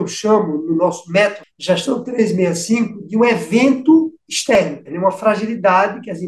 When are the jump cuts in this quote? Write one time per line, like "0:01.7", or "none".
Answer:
0:01.5
0:04.6